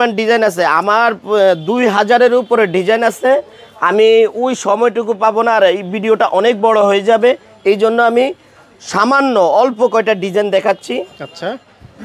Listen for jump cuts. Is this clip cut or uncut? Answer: uncut